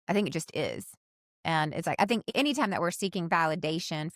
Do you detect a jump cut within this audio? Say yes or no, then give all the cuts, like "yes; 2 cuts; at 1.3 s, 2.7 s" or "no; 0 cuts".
yes; 1 cut; at 2.2 s